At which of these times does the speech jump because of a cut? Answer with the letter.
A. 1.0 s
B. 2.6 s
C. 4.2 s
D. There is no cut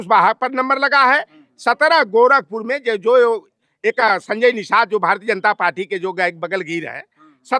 D